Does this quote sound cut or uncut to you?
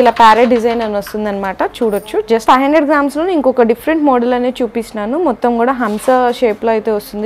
cut